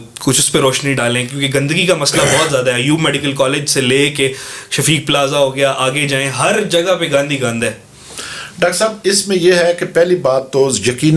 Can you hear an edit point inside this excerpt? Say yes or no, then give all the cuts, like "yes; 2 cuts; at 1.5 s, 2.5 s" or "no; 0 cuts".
no; 0 cuts